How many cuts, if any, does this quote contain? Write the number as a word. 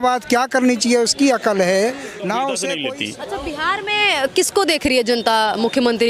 one